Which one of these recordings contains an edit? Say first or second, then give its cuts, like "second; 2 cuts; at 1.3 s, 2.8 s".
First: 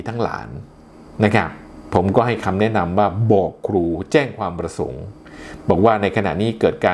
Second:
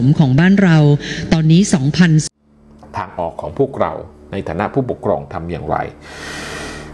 second; 1 cut; at 2.2 s